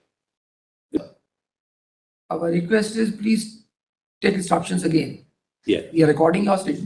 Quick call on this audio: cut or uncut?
cut